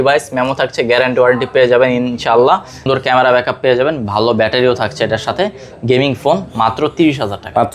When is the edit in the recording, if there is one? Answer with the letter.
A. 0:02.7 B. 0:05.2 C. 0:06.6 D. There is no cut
A